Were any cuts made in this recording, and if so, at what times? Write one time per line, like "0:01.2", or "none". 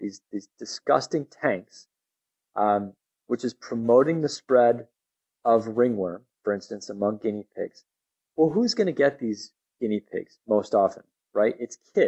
none

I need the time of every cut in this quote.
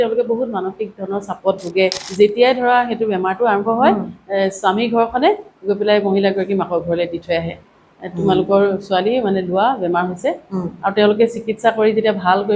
0:02.0

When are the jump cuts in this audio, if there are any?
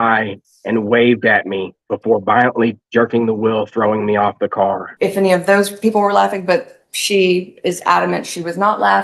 0:04.9

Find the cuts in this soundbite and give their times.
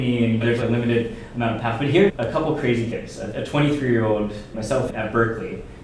0:02.1

